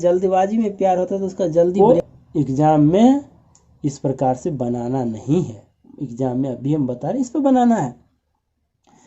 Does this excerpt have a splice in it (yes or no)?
yes